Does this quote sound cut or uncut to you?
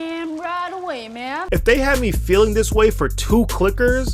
cut